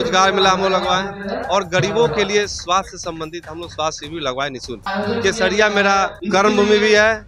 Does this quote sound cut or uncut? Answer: cut